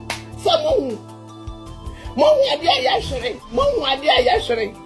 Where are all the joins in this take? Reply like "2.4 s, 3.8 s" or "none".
none